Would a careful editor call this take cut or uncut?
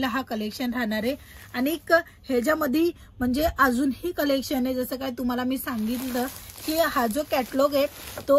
uncut